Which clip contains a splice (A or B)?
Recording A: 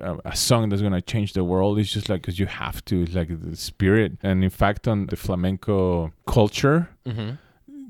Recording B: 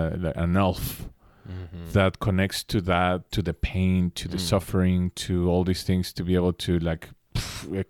A